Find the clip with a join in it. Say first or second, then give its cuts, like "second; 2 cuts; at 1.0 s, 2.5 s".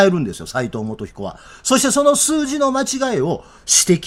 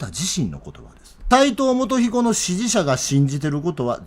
second; 1 cut; at 1.3 s